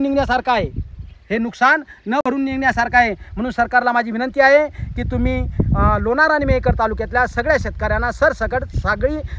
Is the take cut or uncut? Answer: uncut